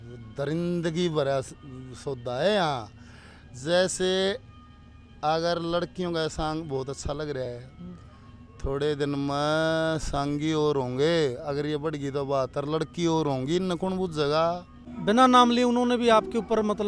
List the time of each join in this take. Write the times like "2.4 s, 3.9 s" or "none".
14.9 s